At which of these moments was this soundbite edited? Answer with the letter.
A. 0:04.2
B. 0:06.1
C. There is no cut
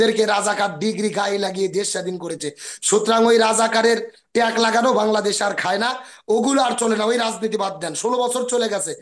C